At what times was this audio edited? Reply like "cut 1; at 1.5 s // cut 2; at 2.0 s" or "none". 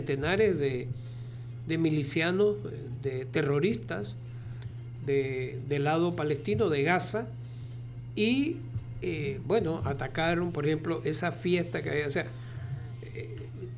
none